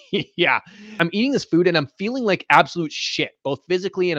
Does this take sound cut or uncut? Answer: cut